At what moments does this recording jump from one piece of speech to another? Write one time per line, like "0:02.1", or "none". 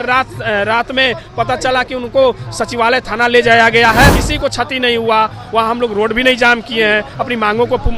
0:04.2